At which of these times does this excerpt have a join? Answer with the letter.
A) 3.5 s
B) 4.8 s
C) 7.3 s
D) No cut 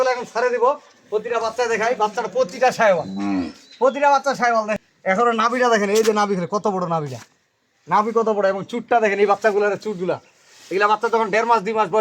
B